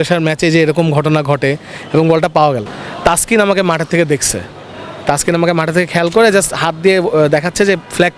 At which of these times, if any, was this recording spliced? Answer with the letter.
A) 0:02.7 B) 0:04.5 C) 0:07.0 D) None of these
A